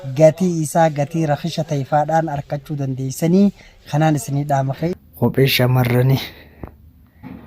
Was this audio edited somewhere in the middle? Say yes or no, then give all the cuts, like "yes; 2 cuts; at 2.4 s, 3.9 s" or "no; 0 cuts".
yes; 1 cut; at 4.9 s